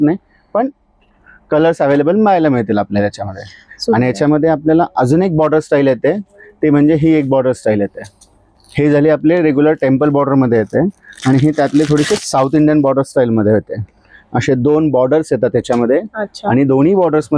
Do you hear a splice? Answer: no; 0 cuts

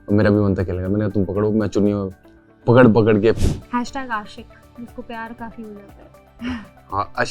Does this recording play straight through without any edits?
no; 1 cut; at 3.4 s

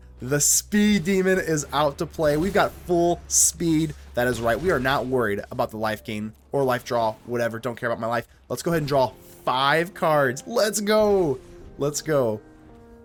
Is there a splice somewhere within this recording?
no; 0 cuts

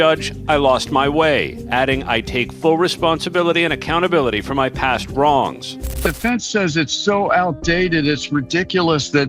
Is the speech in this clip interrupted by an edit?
yes; 1 cut; at 6.0 s

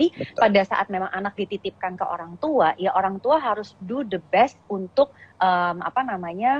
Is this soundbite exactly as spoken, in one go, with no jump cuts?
yes; 0 cuts

